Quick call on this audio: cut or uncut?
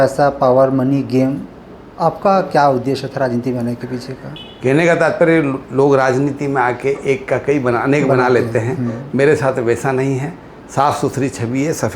cut